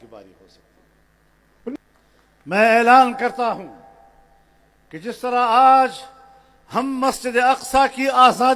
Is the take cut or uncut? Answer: cut